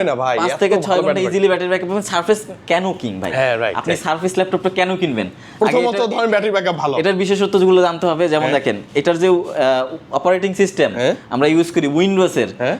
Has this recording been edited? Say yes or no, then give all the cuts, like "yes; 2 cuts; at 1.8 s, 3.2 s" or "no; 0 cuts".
no; 0 cuts